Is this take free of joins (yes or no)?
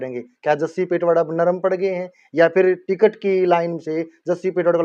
yes